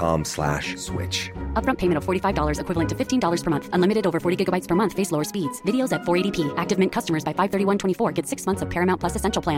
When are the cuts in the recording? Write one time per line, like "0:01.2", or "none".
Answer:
none